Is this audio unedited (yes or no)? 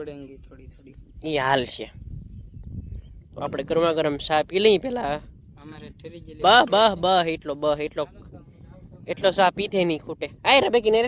yes